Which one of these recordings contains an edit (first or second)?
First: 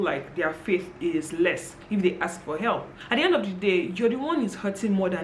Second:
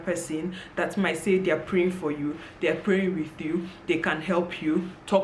first